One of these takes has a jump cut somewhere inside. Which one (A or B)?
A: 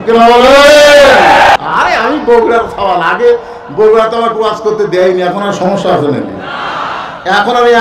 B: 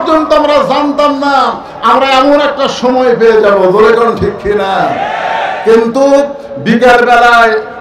A